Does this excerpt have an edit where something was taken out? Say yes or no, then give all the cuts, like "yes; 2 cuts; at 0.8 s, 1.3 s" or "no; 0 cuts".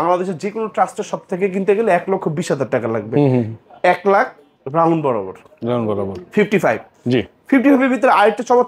no; 0 cuts